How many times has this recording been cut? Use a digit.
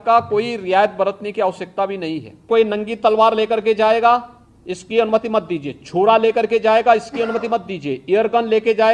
1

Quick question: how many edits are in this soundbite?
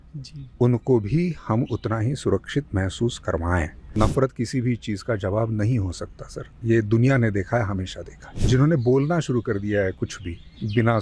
2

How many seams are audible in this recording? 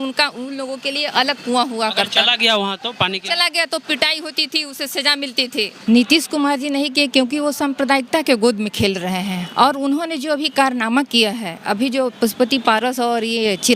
1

